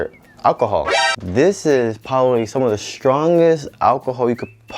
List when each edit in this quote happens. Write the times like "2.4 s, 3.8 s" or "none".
1.1 s